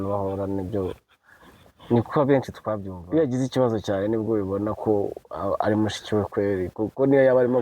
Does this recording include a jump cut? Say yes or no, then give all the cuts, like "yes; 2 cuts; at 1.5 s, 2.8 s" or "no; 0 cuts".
yes; 1 cut; at 2.9 s